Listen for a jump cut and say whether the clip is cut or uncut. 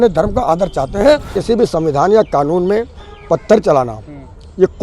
cut